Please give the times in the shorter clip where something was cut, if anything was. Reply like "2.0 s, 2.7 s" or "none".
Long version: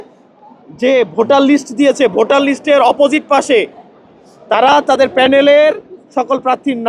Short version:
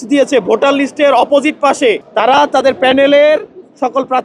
2.1 s